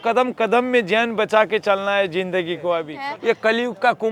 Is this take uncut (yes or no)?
no